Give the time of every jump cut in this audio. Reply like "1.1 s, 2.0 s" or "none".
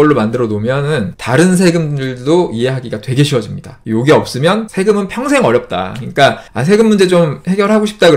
1.2 s, 3.8 s, 4.7 s